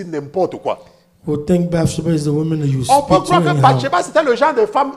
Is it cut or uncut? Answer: uncut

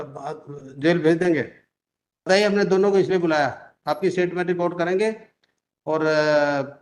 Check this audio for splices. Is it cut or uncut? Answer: cut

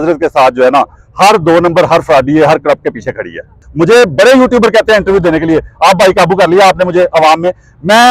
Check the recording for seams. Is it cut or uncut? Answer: cut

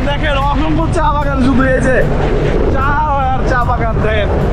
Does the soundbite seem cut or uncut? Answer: uncut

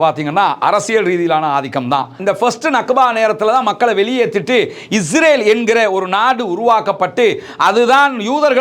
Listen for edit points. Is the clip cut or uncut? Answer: cut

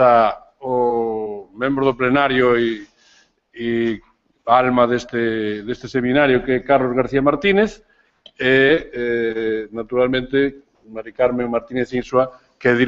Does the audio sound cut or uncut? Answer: uncut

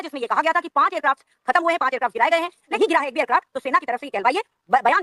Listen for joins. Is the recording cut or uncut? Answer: cut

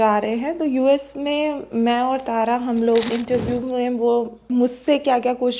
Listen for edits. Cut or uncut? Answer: cut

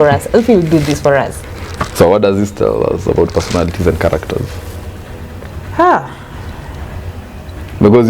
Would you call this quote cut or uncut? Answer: uncut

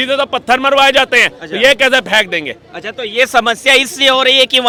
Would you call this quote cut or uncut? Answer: uncut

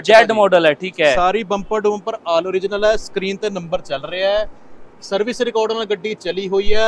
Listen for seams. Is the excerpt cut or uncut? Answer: uncut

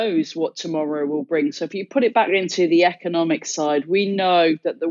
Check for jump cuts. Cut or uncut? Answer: uncut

